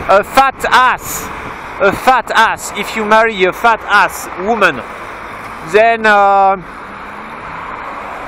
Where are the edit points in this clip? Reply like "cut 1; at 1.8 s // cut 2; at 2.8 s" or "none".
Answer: cut 1; at 2.3 s